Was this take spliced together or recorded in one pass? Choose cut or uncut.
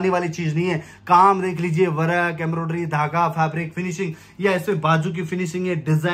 cut